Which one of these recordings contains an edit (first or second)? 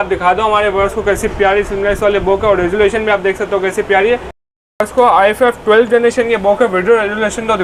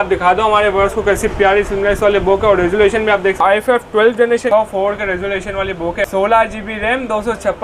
second